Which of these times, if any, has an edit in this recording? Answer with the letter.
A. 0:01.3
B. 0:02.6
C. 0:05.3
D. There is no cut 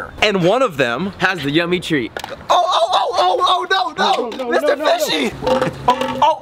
C